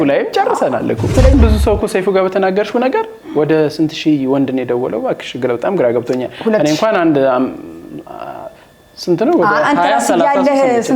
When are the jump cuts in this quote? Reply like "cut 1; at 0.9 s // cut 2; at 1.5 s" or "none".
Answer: cut 1; at 1.3 s

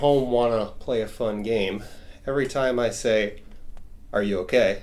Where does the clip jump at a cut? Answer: none

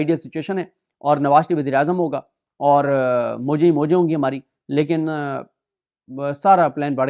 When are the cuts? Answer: none

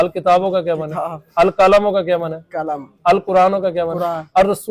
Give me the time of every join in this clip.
none

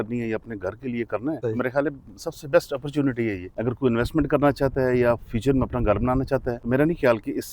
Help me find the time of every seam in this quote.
cut 1; at 1.4 s // cut 2; at 3.5 s // cut 3; at 6.6 s

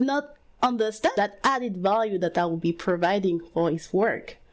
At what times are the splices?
cut 1; at 1.2 s

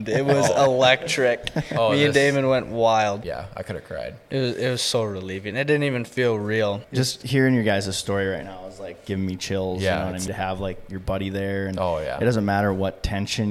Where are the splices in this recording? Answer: cut 1; at 3.3 s // cut 2; at 6.8 s // cut 3; at 10.3 s

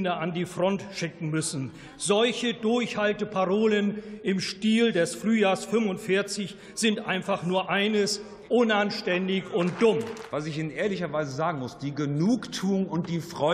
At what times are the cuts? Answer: cut 1; at 10.2 s

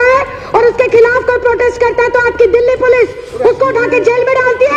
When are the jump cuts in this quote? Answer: none

